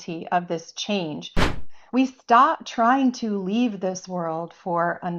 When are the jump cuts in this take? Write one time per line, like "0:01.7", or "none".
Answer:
0:01.6